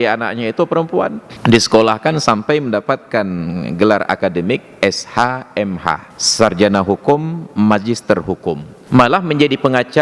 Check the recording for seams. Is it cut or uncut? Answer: cut